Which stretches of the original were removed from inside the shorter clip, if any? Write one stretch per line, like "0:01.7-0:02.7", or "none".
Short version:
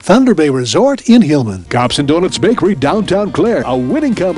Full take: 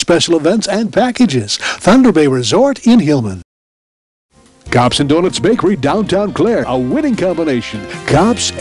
0:03.4-0:04.6